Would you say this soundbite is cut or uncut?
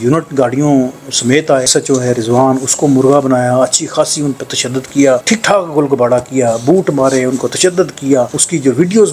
cut